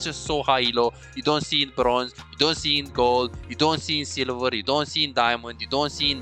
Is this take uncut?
yes; 0 cuts

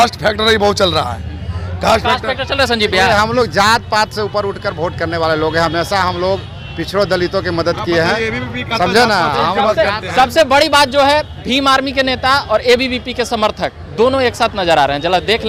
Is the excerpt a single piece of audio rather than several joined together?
yes; 0 cuts

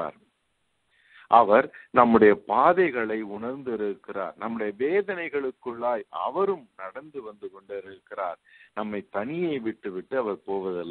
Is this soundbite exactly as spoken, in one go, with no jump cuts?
yes; 0 cuts

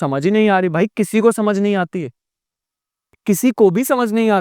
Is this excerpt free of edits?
yes; 0 cuts

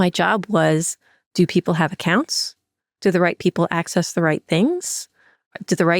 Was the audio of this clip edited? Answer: no; 0 cuts

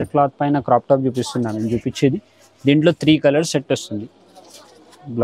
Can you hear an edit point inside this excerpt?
no; 0 cuts

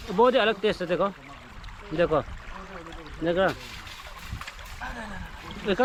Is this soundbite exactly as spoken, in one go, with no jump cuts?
yes; 0 cuts

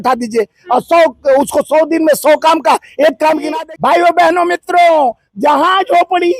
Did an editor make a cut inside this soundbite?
yes; 1 cut; at 3.5 s

